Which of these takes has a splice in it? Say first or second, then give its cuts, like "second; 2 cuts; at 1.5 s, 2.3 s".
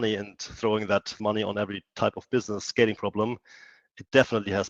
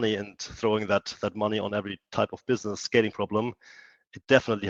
first; 1 cut; at 1.2 s